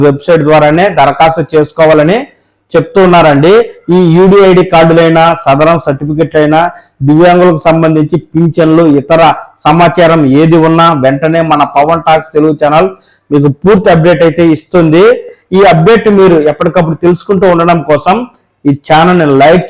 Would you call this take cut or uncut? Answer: uncut